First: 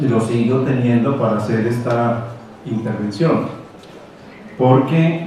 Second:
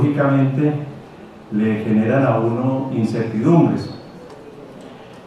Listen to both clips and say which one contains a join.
second; 1 cut; at 1.0 s

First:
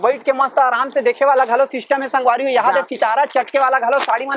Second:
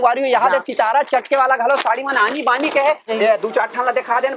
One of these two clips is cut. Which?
second; 1 cut; at 3.1 s

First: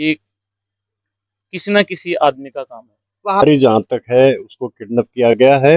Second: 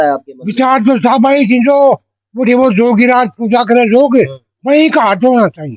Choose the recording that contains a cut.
first; 1 cut; at 3.4 s

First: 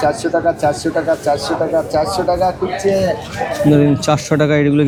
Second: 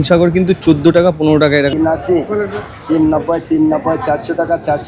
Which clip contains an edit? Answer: second; 1 cut; at 1.7 s

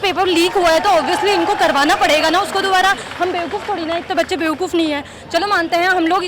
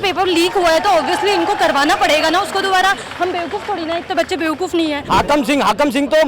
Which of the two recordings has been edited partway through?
second; 1 cut; at 5.0 s

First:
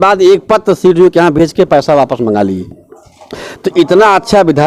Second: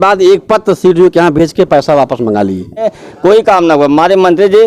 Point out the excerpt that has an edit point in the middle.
second; 1 cut; at 3.0 s

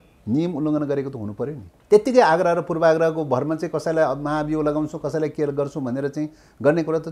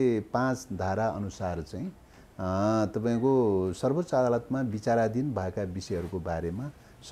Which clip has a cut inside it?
first; 1 cut; at 1.7 s

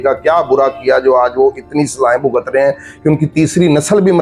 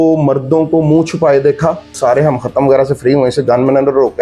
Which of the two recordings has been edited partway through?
second; 1 cut; at 1.9 s

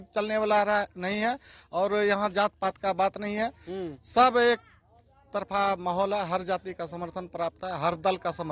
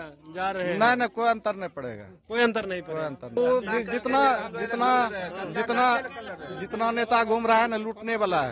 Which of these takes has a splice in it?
second; 1 cut; at 3.4 s

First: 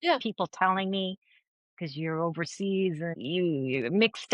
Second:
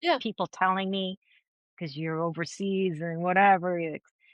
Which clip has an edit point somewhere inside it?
first; 1 cut; at 3.1 s

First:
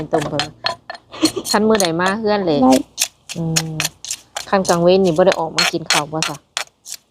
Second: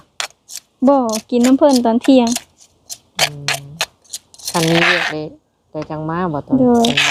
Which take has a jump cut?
first; 1 cut; at 2.6 s

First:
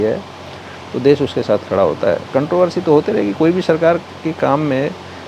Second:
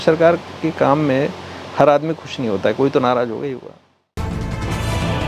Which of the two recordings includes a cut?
second; 1 cut; at 4.2 s

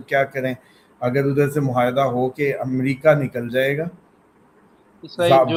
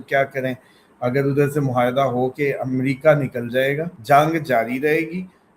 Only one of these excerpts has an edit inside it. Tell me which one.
second; 1 cut; at 3.9 s

